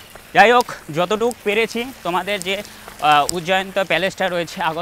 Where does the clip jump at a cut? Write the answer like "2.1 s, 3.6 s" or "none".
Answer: none